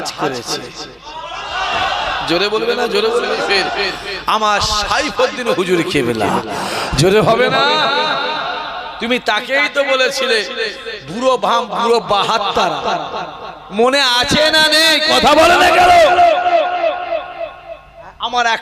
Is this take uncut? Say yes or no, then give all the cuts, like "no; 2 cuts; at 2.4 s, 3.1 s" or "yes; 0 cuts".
no; 1 cut; at 3.5 s